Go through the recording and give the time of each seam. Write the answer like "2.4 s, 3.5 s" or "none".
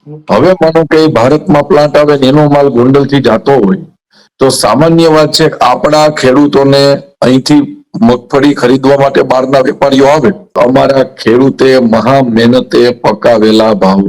10.6 s